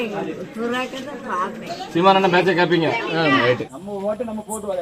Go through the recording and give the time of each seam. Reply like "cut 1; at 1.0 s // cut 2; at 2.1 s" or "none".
cut 1; at 3.7 s